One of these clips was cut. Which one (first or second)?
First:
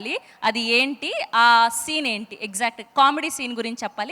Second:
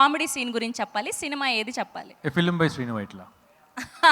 second